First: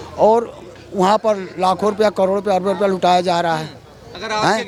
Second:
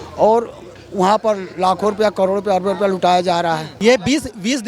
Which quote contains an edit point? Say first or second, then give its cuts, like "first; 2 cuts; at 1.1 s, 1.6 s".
second; 1 cut; at 3.7 s